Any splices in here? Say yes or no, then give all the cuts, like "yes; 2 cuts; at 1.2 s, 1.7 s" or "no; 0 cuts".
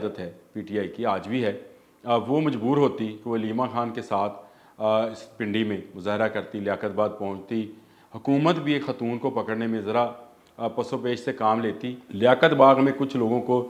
yes; 1 cut; at 12.0 s